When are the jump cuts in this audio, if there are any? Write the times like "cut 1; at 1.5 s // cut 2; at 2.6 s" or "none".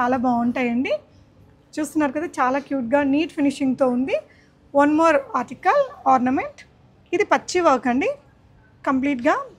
none